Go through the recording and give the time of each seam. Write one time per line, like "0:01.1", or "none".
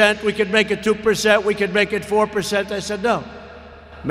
none

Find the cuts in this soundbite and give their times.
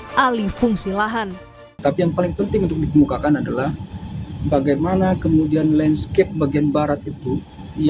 0:01.6

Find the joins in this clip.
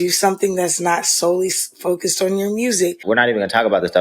0:03.0

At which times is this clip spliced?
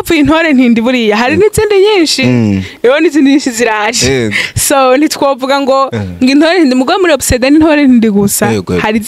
none

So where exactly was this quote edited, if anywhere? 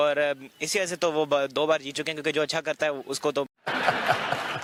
none

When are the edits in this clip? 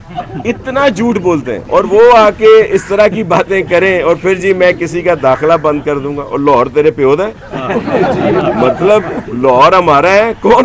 0:01.6

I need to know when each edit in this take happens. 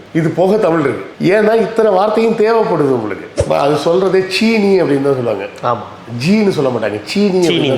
0:03.4

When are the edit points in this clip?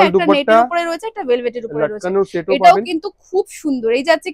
none

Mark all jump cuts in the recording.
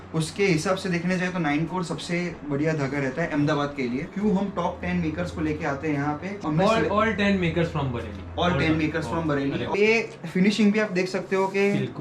0:04.1
0:06.3
0:09.7

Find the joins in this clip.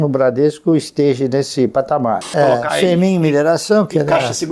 0:02.3

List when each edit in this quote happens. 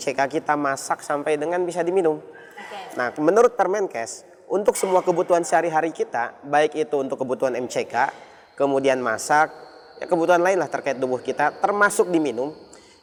none

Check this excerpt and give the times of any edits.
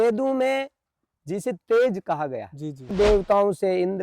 0:02.9

